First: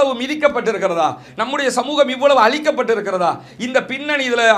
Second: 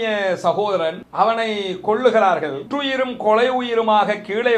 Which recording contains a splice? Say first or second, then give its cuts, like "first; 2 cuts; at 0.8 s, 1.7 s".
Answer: second; 2 cuts; at 1.0 s, 2.7 s